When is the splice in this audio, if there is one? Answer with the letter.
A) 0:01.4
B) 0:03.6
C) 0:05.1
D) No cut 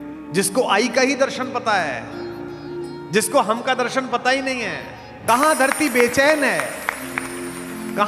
C